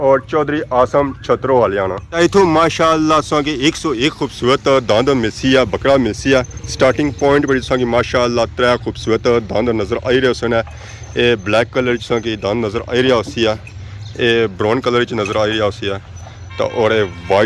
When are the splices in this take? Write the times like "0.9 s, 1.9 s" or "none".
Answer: none